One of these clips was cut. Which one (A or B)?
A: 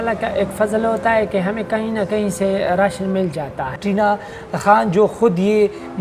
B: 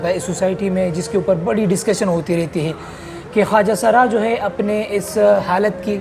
A